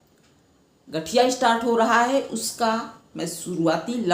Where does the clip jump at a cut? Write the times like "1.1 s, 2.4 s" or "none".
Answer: none